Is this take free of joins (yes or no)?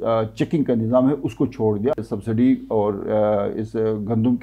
no